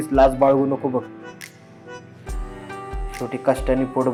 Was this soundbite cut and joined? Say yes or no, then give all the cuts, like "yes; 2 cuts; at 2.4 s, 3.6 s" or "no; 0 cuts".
no; 0 cuts